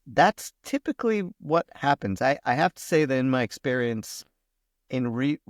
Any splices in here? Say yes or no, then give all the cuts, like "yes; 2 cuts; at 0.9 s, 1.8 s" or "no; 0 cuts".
no; 0 cuts